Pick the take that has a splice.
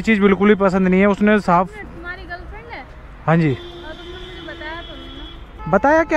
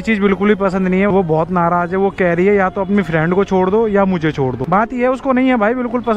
second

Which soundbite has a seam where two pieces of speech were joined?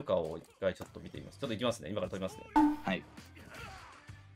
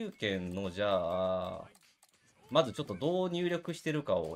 first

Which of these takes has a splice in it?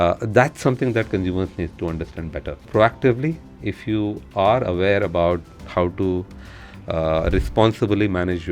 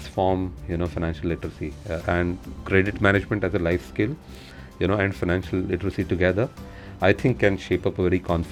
first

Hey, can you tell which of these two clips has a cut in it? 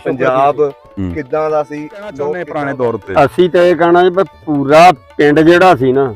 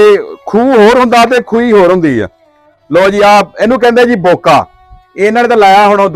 first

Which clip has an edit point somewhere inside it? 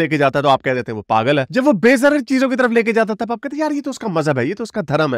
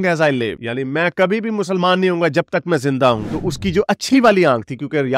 second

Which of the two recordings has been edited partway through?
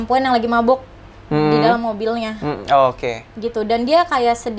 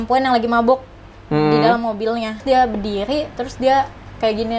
second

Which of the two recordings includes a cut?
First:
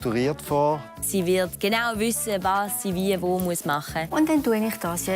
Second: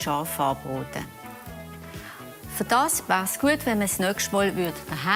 first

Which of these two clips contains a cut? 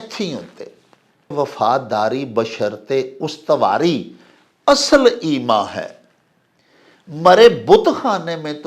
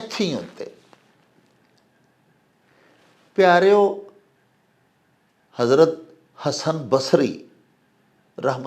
first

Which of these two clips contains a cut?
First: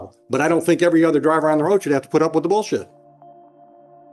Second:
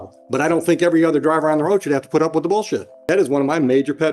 second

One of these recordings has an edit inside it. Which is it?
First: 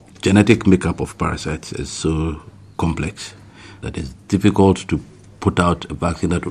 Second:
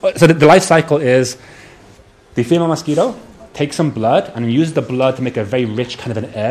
first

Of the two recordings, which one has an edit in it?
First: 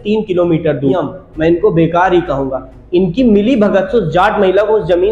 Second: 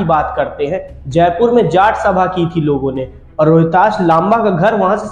first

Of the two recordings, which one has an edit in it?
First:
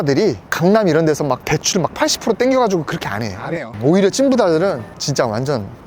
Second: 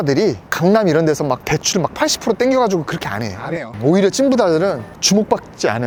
first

